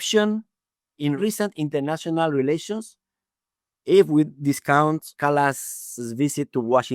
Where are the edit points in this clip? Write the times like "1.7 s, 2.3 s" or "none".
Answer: 1.2 s, 5.1 s